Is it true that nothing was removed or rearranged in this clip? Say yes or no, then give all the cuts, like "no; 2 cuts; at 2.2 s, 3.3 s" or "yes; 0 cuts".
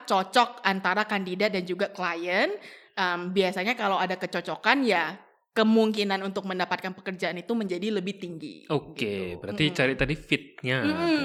yes; 0 cuts